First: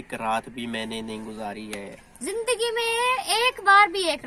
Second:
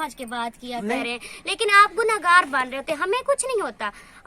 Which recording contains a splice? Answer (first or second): second